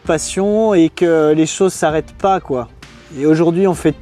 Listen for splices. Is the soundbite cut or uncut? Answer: uncut